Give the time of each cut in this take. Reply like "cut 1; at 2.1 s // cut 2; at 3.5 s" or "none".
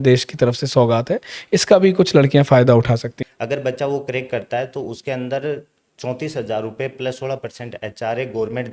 cut 1; at 3.2 s